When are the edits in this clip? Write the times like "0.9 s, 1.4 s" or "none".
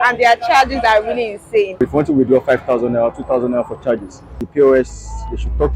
1.8 s, 4.5 s